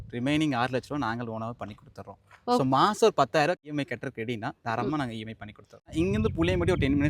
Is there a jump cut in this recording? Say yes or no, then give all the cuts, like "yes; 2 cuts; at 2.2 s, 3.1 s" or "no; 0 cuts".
yes; 2 cuts; at 3.7 s, 5.9 s